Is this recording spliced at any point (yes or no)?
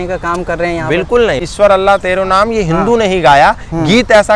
yes